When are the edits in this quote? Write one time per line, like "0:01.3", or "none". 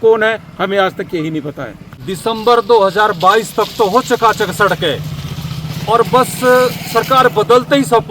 0:02.1